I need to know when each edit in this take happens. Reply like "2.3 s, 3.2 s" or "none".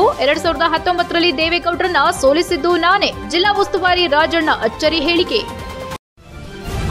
5.9 s

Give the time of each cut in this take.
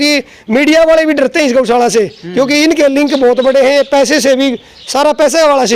none

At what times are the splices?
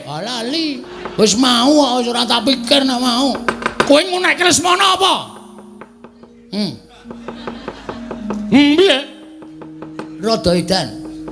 0.9 s, 3.7 s

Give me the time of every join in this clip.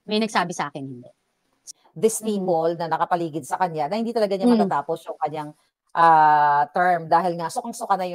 1.6 s

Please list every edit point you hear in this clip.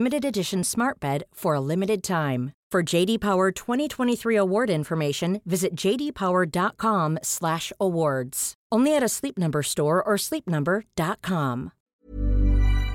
11.9 s

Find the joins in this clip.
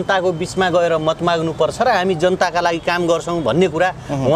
none

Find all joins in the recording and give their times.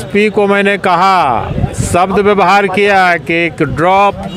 none

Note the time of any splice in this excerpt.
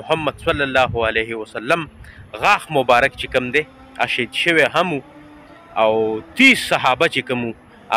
none

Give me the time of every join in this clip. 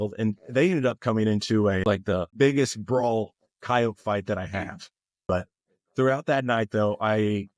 1.8 s, 5.3 s

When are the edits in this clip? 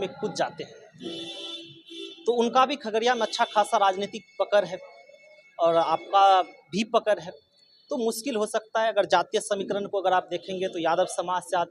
none

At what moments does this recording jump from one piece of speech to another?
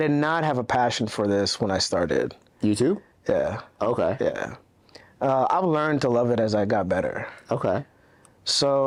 none

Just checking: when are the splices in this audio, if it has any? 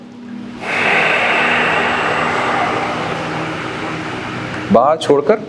none

